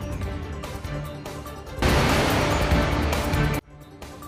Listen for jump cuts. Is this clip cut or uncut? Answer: uncut